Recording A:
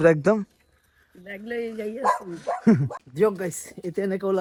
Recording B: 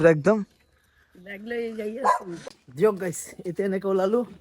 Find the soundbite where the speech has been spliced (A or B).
B